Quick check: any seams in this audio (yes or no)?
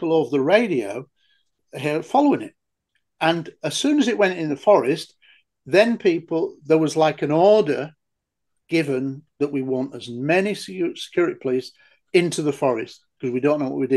no